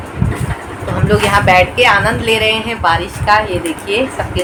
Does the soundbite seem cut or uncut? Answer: uncut